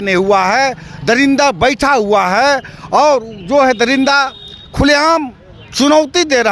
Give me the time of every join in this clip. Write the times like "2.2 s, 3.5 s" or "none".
none